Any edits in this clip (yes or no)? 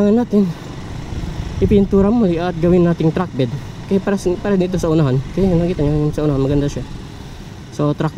no